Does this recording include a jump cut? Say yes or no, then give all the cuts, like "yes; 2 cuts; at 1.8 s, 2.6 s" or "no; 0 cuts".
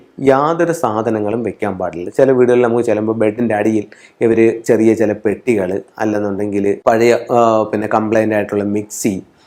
no; 0 cuts